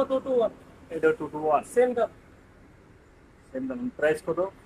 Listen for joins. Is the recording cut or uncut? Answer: uncut